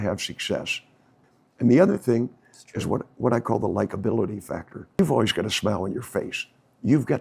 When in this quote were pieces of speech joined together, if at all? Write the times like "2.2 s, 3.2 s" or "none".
1.1 s, 5.0 s

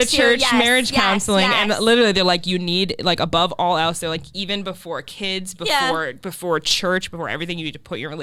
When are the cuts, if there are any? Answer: none

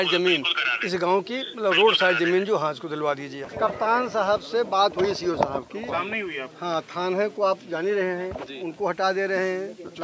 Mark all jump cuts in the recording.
3.5 s

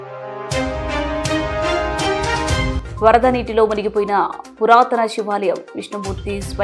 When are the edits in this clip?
2.7 s

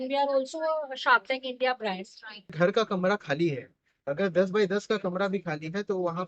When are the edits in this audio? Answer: 2.5 s

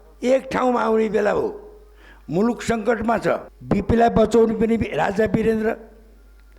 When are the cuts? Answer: 3.5 s

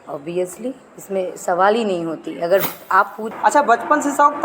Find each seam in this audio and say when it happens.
3.3 s

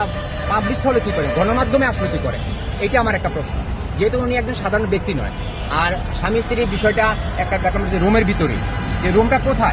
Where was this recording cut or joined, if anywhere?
none

